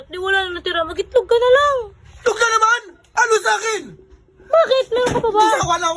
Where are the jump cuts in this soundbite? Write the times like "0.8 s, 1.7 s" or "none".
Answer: 2.9 s